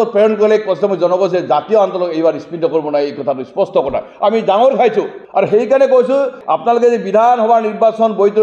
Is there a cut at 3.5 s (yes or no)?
no